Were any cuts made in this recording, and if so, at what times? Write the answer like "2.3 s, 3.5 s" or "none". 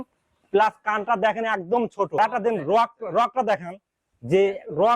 2.2 s